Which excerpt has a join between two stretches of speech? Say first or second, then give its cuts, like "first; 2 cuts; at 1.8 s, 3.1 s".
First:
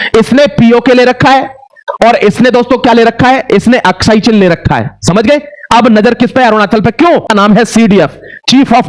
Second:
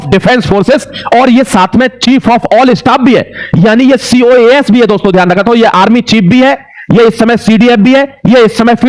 first; 1 cut; at 7.3 s